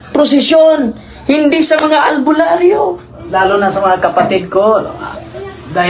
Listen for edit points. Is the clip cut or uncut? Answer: cut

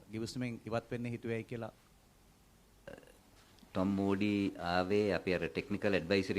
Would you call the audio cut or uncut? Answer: cut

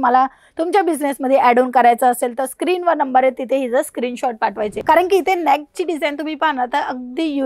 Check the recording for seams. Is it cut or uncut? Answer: cut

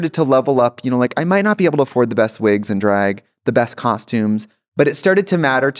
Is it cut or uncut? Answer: uncut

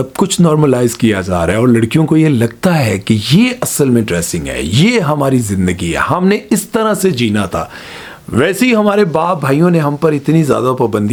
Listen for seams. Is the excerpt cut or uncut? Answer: uncut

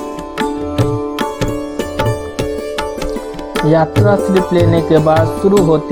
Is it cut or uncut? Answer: uncut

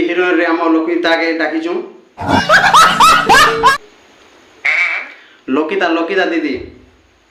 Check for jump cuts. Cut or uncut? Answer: uncut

